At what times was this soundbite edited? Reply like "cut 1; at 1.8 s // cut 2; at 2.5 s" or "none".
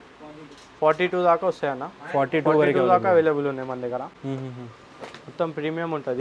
none